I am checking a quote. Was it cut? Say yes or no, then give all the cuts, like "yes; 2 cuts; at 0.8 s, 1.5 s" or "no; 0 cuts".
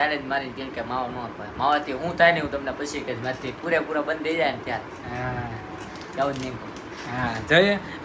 no; 0 cuts